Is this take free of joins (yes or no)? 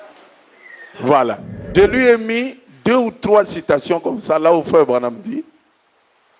no